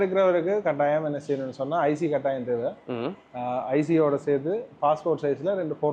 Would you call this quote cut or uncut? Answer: uncut